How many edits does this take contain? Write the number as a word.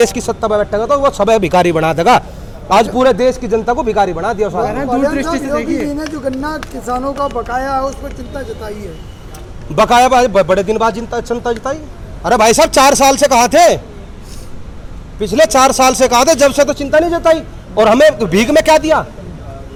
zero